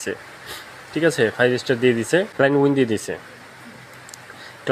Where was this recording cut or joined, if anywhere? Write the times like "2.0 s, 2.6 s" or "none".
2.3 s